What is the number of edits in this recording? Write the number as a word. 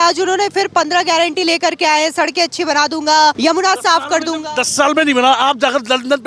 one